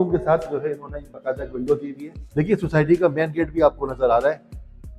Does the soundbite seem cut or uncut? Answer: uncut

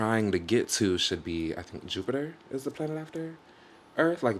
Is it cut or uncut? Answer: uncut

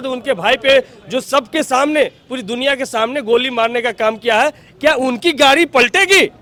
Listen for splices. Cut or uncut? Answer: uncut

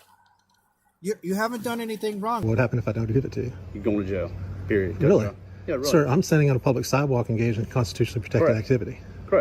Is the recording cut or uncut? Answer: cut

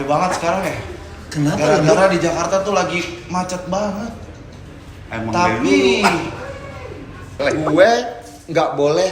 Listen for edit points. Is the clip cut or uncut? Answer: cut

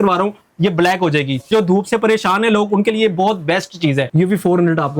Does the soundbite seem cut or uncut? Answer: cut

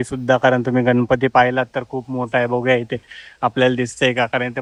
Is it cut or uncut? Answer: uncut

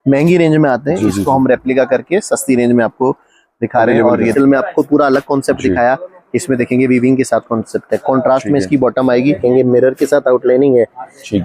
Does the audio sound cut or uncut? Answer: cut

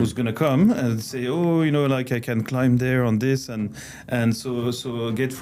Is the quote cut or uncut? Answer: uncut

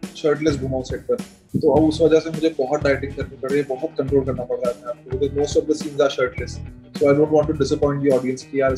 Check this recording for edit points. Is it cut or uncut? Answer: cut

